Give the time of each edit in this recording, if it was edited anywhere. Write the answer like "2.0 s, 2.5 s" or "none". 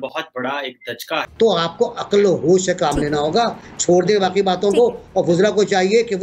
1.2 s

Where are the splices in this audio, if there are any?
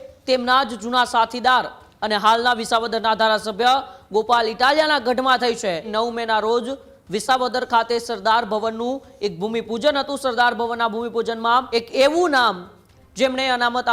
5.9 s, 11.7 s

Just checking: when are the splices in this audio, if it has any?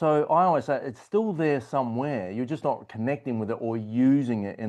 none

